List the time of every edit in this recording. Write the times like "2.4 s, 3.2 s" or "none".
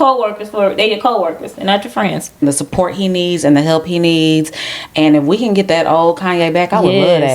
2.4 s